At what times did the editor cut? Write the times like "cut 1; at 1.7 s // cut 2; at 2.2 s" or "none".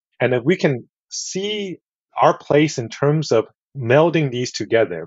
none